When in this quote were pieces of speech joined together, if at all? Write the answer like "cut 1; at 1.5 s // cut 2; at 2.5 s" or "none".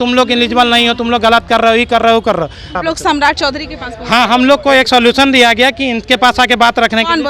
cut 1; at 2.8 s